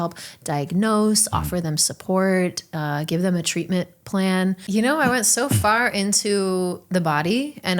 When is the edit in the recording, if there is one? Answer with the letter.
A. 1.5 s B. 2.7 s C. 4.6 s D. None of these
C